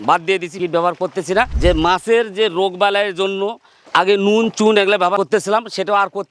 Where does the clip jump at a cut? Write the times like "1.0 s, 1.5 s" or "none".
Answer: 1.7 s